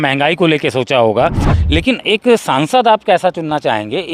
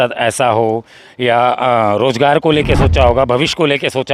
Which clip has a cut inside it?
first; 1 cut; at 1.5 s

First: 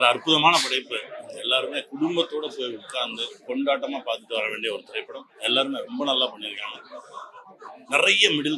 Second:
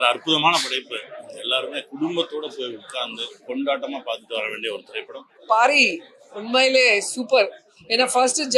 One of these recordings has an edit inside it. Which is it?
second; 1 cut; at 5.3 s

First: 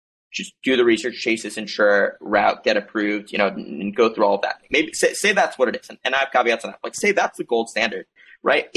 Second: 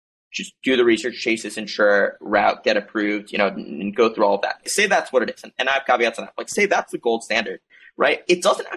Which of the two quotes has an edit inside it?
second; 1 cut; at 4.7 s

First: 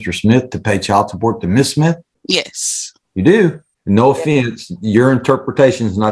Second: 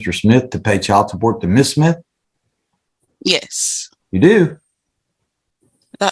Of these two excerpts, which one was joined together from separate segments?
first; 2 cuts; at 2.1 s, 3.7 s

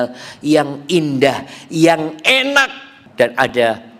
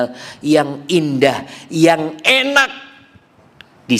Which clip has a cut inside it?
first; 1 cut; at 3.0 s

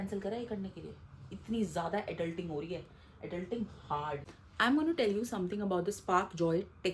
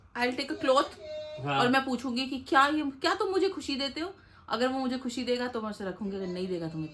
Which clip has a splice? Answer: first; 1 cut; at 4.2 s

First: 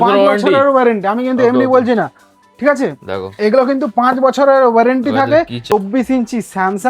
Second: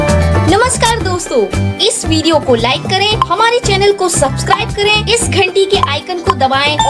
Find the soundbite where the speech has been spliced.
first; 1 cut; at 5.6 s

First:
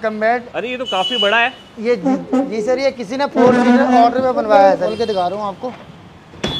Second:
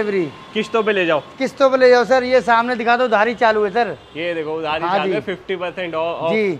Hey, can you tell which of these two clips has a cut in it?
first; 1 cut; at 4.9 s

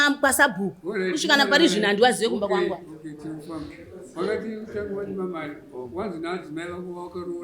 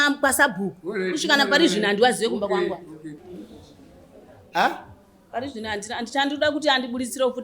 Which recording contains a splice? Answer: second; 1 cut; at 3.2 s

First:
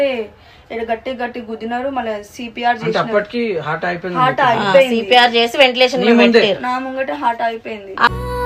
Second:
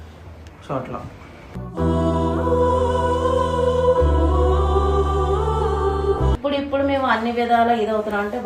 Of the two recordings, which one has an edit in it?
second; 1 cut; at 6.3 s

